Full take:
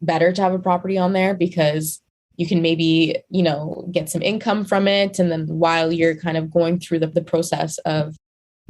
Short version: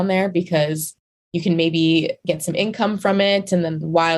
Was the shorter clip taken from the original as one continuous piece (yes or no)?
no